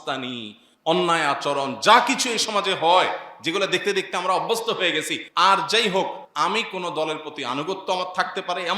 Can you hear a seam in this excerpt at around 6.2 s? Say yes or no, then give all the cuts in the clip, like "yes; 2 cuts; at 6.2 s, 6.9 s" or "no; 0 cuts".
yes; 2 cuts; at 5.2 s, 6.2 s